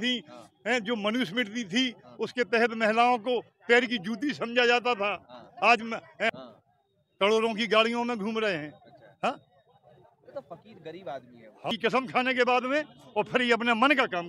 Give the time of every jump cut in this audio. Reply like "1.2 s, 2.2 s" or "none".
6.3 s, 11.7 s